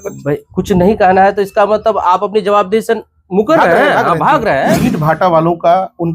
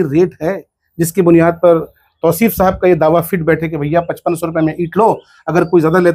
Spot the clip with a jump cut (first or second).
first